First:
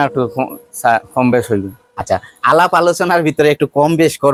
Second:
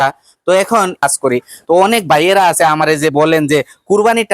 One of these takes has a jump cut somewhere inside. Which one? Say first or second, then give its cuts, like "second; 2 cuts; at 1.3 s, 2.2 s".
second; 1 cut; at 1.0 s